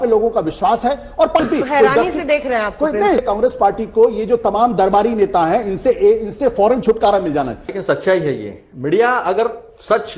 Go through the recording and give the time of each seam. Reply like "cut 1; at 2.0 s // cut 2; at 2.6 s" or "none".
cut 1; at 1.4 s // cut 2; at 3.2 s // cut 3; at 7.8 s